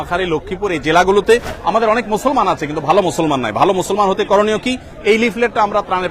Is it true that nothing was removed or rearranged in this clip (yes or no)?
no